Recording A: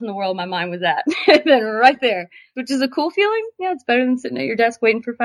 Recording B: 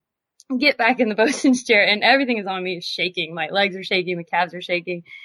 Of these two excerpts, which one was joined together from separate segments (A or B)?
A